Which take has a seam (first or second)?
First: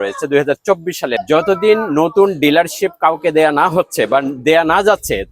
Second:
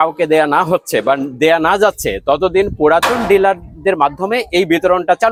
first